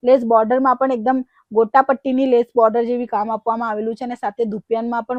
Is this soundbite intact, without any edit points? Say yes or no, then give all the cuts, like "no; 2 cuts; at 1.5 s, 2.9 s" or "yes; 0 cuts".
yes; 0 cuts